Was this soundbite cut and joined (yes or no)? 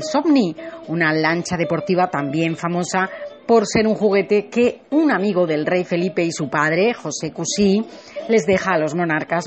yes